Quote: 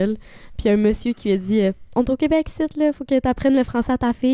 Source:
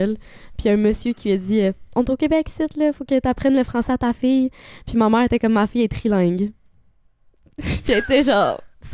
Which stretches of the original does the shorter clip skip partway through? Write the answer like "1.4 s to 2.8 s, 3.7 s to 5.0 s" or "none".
none